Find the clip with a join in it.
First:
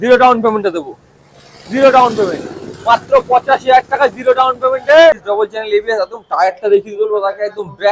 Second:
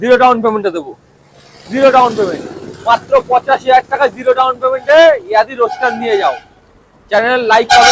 first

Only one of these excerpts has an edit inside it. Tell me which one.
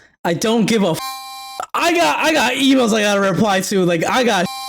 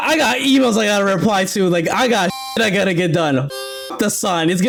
first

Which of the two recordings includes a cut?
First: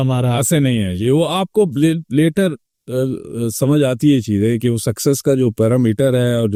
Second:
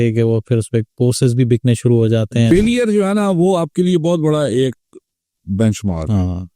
second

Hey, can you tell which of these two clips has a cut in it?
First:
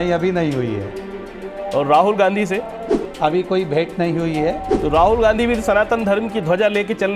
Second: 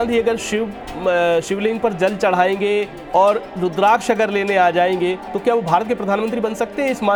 first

